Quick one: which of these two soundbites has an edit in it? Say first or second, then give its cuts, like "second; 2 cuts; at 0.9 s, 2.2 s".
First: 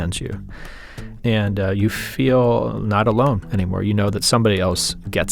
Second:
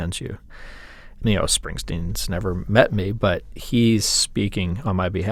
first; 1 cut; at 1.0 s